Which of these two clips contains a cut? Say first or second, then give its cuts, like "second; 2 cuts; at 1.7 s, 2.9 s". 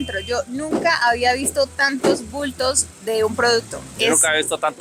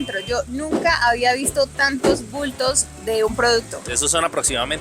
second; 1 cut; at 3.8 s